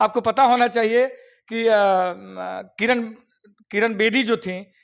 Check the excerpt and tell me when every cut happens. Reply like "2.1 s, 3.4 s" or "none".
none